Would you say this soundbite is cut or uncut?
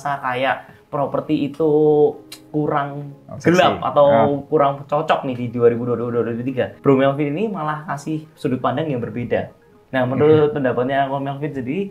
uncut